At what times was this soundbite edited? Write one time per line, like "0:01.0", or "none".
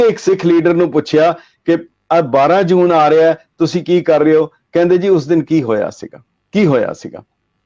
none